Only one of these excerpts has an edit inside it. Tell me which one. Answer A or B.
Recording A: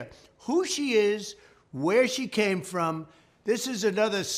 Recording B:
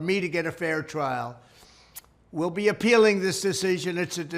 B